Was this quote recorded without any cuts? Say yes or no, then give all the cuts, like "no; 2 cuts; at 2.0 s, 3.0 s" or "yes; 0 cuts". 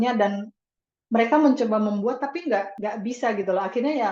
no; 1 cut; at 2.7 s